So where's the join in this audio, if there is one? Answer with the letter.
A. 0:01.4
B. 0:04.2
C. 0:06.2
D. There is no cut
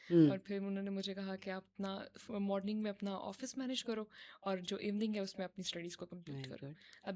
D